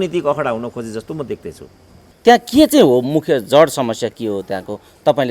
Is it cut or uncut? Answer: cut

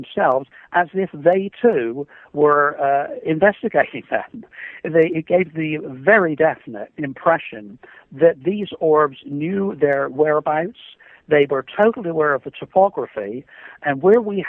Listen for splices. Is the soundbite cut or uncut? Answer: uncut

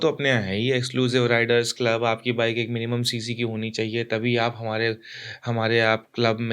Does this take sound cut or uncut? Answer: uncut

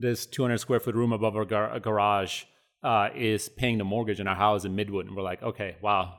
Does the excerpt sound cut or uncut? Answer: uncut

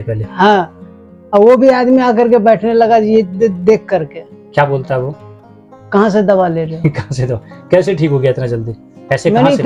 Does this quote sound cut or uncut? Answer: uncut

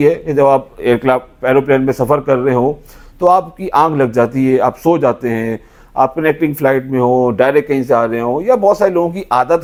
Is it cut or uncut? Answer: uncut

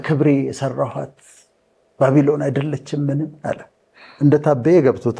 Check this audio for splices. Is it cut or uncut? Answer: uncut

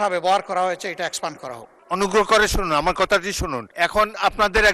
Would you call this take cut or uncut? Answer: cut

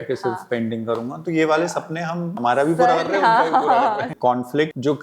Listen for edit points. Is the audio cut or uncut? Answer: cut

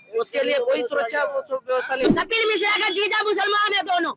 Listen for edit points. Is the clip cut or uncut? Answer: cut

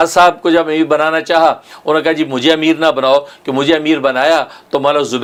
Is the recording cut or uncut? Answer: uncut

